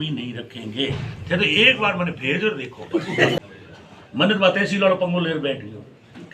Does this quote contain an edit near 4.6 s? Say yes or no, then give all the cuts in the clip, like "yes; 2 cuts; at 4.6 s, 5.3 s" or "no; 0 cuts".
no; 1 cut; at 3.4 s